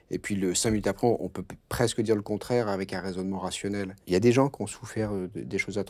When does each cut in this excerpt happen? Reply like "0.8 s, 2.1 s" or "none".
4.0 s